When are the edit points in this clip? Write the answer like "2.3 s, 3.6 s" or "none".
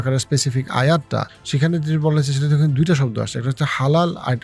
1.4 s